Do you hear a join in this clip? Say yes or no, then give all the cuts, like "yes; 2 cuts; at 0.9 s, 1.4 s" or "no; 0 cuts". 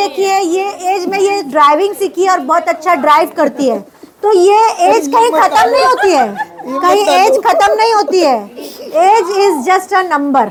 no; 0 cuts